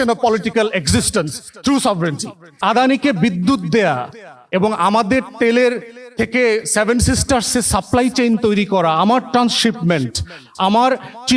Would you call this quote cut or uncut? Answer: cut